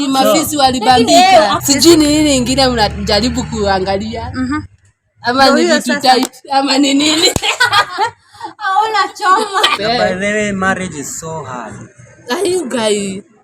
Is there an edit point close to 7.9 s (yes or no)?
no